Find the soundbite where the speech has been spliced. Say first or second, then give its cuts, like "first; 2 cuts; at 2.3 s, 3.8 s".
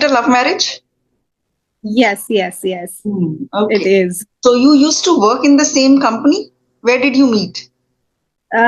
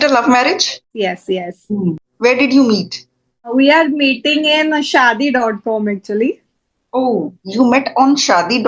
second; 3 cuts; at 0.9 s, 2.0 s, 3.5 s